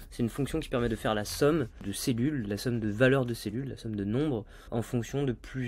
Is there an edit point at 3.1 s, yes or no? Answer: no